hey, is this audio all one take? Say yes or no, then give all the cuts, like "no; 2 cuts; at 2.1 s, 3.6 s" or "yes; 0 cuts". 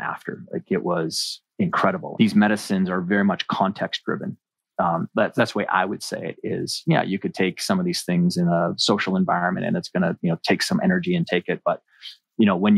no; 1 cut; at 2.1 s